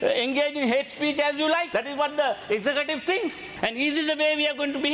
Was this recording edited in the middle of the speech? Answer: yes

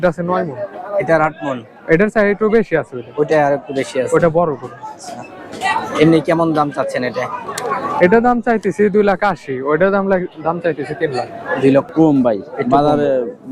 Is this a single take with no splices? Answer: no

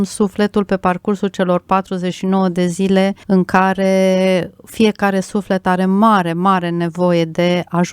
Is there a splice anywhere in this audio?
yes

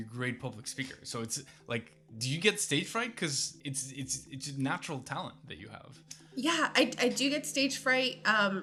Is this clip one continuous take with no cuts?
yes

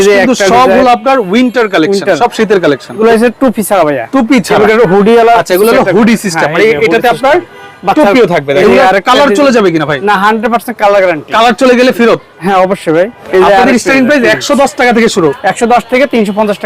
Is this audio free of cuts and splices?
no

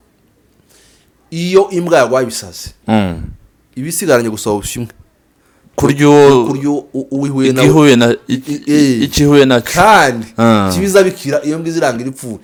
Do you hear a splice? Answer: no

